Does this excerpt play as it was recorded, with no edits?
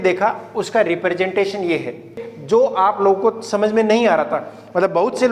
no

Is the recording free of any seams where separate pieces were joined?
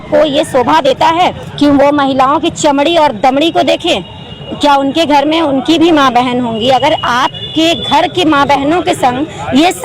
yes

